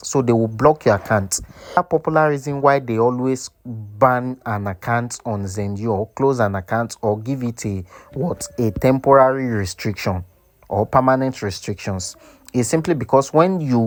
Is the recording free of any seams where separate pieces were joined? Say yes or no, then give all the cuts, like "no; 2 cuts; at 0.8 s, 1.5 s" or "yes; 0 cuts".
yes; 0 cuts